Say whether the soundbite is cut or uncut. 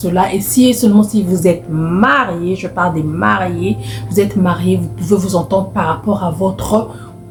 uncut